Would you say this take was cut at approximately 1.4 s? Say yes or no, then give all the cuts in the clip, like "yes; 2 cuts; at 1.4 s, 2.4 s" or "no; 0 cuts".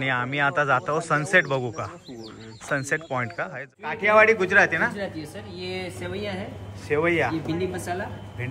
no; 1 cut; at 3.5 s